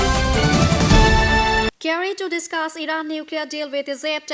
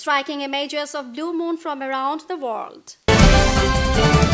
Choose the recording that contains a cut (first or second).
first